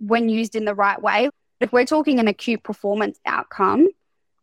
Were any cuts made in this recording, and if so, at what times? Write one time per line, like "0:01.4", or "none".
0:01.3